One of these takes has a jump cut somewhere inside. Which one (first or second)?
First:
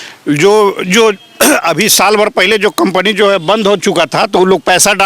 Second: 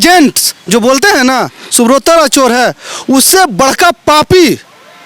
first